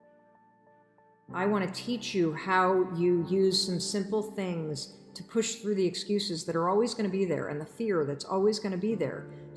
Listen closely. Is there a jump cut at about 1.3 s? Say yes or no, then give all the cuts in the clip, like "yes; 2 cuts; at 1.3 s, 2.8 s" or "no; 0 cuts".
yes; 1 cut; at 1.3 s